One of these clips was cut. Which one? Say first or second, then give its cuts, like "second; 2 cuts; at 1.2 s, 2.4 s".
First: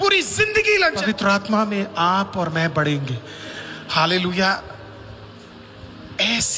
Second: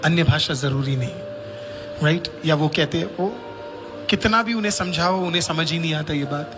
first; 1 cut; at 1.0 s